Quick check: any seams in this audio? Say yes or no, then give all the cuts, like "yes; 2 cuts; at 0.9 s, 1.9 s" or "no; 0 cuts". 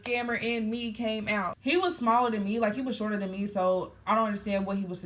yes; 1 cut; at 1.5 s